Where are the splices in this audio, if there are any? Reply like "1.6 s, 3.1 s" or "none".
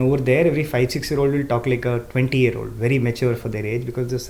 none